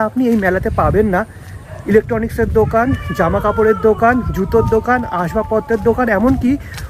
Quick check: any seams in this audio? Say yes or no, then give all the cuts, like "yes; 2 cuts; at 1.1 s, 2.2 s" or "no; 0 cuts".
no; 0 cuts